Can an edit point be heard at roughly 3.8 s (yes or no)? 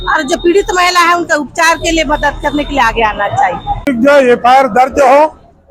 yes